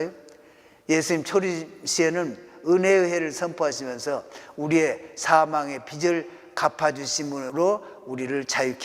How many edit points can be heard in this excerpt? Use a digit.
1